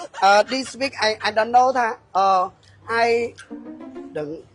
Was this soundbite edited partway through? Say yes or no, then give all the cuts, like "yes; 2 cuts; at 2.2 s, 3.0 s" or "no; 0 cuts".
no; 0 cuts